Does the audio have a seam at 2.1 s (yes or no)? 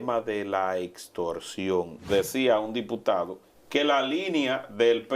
yes